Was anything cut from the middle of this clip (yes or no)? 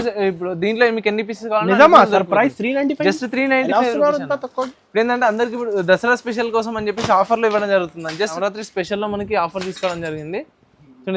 yes